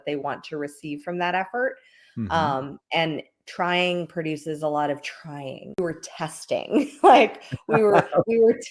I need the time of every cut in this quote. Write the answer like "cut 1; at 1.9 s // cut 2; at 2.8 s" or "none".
cut 1; at 5.8 s